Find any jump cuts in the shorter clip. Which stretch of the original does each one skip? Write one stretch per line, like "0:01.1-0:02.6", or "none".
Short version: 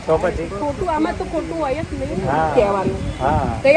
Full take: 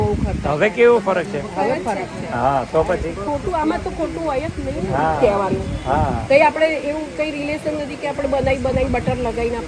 none